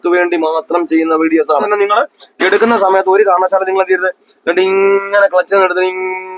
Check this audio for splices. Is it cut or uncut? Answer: cut